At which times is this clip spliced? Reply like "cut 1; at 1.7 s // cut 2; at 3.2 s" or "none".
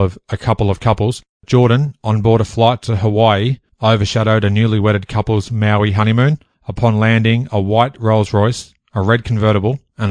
cut 1; at 1.4 s